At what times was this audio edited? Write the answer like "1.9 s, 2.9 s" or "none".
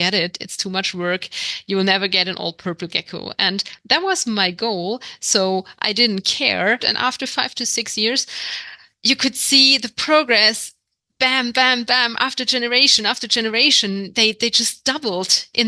6.9 s